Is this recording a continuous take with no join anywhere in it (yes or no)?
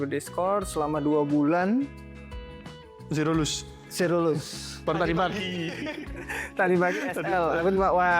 yes